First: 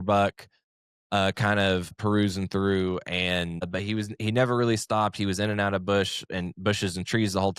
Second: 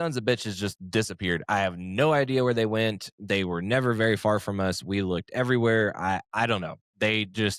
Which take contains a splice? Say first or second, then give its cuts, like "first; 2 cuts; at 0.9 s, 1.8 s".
first; 2 cuts; at 2.0 s, 3.7 s